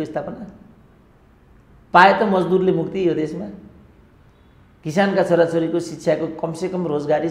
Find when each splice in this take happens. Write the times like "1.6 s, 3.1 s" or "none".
none